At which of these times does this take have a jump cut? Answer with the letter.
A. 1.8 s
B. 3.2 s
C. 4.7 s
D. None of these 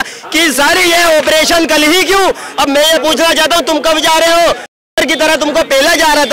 C